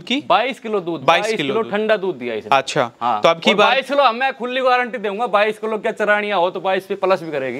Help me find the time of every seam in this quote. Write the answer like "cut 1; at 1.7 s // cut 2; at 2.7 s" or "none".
none